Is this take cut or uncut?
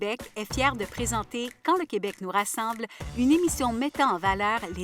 uncut